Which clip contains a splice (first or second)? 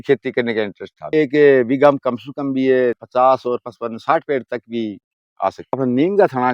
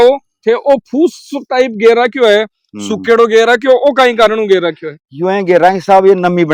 first